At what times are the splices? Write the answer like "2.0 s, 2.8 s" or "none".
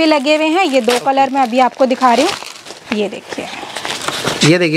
none